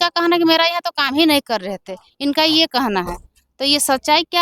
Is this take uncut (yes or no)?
yes